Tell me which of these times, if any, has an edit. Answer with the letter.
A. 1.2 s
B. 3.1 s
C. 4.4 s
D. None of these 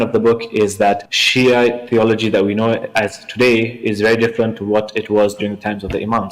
A